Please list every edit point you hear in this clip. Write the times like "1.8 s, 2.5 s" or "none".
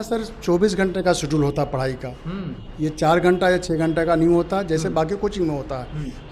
none